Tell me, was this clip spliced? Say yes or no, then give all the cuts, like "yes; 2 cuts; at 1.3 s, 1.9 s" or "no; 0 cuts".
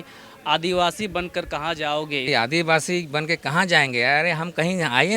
yes; 1 cut; at 2.3 s